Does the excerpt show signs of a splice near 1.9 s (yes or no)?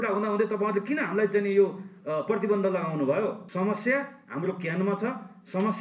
no